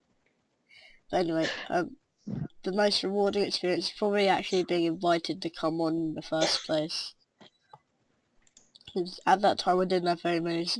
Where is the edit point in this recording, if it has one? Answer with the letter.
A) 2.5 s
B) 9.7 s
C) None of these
B